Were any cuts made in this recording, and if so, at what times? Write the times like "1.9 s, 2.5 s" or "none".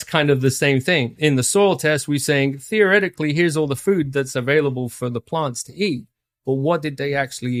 none